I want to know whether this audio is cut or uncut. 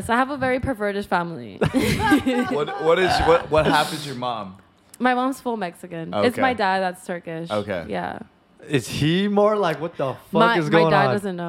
uncut